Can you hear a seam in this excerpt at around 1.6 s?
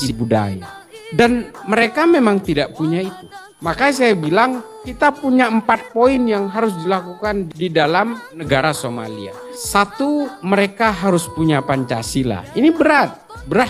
no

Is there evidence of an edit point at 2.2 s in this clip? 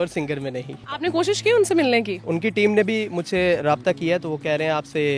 yes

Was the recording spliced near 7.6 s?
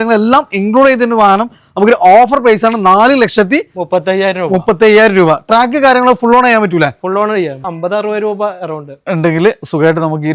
yes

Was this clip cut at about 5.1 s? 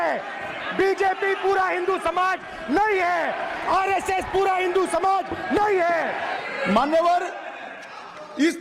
no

